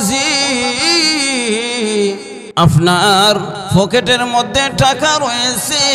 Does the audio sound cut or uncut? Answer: cut